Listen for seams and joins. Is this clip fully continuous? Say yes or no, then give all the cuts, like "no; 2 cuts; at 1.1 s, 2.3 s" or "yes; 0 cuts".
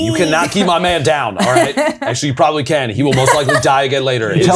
yes; 0 cuts